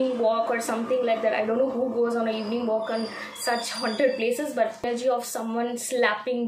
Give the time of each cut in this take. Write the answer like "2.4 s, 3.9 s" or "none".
4.8 s